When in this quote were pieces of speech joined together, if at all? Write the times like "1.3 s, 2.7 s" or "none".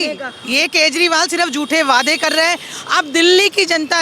none